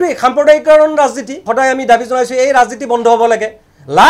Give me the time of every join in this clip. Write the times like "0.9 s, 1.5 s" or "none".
1.4 s